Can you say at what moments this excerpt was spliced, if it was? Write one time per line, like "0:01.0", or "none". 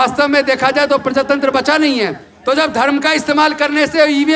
0:02.3